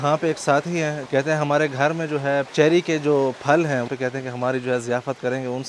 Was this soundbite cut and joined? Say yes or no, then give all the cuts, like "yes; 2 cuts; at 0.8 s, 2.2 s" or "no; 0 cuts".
yes; 3 cuts; at 1.0 s, 2.5 s, 3.9 s